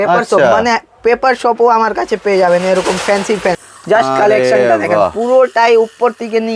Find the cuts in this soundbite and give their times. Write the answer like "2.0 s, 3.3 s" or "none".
3.6 s